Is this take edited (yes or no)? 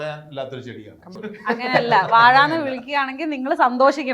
yes